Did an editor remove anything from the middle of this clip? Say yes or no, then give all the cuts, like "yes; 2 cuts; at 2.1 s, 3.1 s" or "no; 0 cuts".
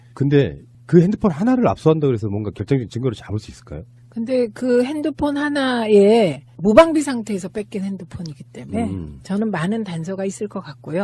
yes; 1 cut; at 9.8 s